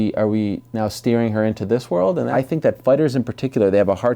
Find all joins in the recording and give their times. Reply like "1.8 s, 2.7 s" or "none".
2.3 s